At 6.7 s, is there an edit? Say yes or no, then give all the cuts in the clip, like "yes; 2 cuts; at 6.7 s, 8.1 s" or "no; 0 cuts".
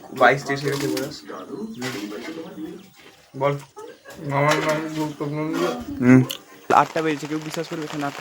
yes; 1 cut; at 6.7 s